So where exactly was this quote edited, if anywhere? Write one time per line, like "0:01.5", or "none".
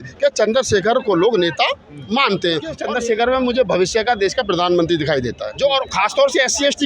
0:02.8
0:05.4